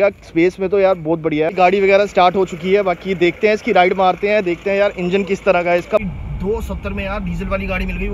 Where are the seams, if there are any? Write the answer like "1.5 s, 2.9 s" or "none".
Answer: 1.5 s, 6.0 s